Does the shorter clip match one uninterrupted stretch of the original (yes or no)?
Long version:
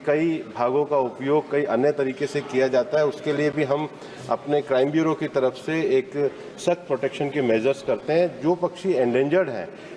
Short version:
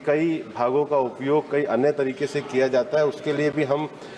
yes